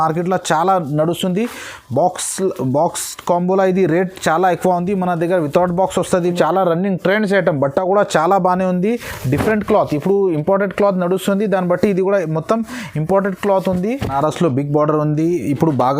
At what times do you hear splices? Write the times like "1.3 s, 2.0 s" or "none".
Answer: 6.3 s, 14.1 s